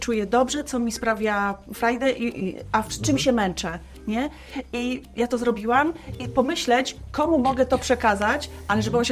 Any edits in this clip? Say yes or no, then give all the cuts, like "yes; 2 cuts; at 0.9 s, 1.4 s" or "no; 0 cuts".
no; 0 cuts